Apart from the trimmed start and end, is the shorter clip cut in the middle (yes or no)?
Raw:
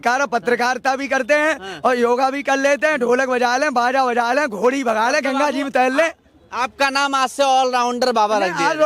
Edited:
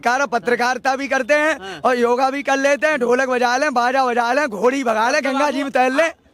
no